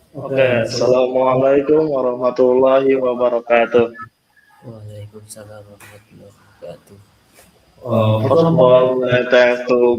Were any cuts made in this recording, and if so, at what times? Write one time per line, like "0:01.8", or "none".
none

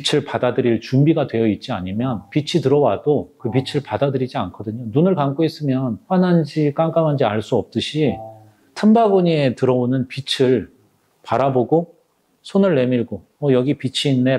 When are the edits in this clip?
none

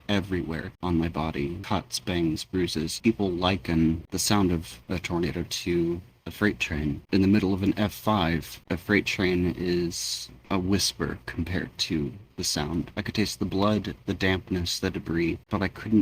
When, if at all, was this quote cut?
0:01.6
0:03.0
0:07.0
0:12.9

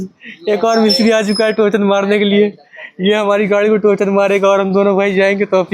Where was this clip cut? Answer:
none

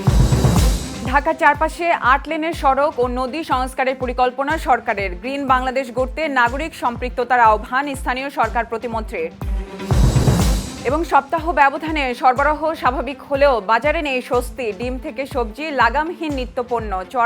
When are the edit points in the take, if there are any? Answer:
0:00.9

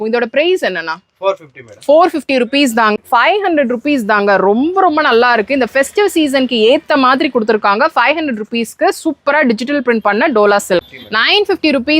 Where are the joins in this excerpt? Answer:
0:02.9
0:11.0

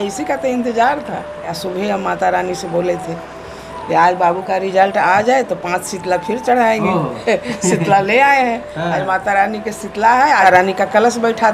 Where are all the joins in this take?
0:01.6
0:10.4

